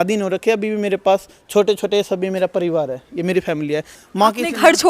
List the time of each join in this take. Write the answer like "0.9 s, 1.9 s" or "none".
4.0 s